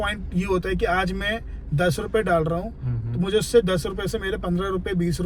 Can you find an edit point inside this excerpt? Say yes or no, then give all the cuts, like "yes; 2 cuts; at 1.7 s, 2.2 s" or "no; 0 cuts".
no; 0 cuts